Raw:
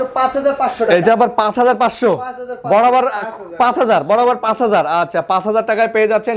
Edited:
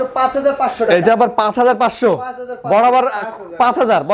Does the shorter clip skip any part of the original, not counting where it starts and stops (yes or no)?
no